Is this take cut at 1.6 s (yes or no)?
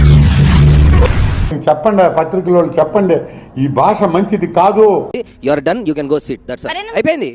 yes